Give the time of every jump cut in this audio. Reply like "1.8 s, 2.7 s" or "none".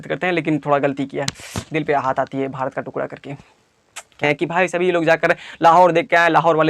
4.2 s